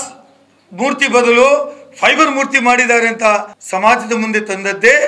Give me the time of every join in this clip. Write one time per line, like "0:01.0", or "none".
0:03.6